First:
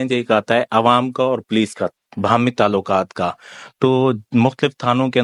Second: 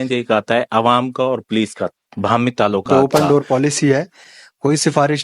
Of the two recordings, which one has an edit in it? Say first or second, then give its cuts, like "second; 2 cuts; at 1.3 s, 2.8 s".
second; 1 cut; at 2.9 s